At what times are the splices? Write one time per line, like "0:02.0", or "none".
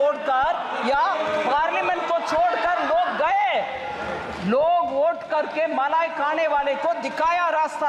none